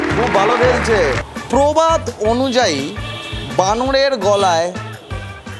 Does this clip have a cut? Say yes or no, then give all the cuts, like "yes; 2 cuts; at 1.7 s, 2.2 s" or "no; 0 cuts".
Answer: yes; 1 cut; at 1.3 s